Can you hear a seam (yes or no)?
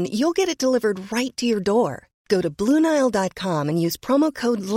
no